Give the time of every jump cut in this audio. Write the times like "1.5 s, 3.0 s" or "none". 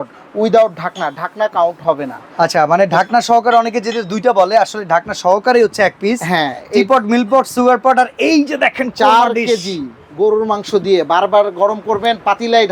none